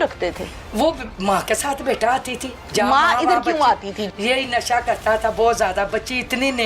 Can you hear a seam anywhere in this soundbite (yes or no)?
yes